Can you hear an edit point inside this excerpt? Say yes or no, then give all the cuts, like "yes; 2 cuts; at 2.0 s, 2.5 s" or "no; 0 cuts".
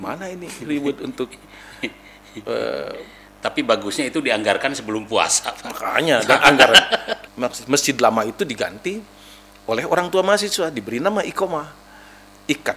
yes; 1 cut; at 7.1 s